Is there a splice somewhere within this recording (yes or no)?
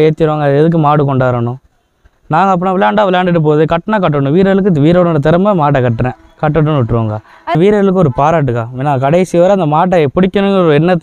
yes